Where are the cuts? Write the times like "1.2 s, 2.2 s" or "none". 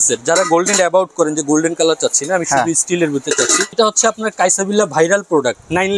3.7 s